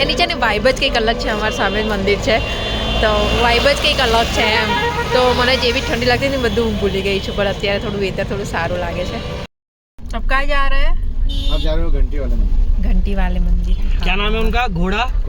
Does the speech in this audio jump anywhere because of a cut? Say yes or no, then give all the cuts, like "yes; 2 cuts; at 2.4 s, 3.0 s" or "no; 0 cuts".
no; 0 cuts